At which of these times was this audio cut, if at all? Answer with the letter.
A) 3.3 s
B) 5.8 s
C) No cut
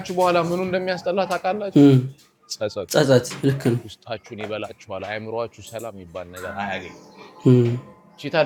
C